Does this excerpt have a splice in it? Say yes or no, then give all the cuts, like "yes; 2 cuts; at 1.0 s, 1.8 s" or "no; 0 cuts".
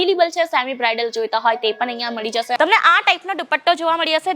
yes; 1 cut; at 2.6 s